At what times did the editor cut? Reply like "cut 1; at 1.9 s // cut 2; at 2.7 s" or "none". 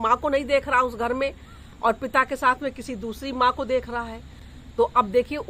none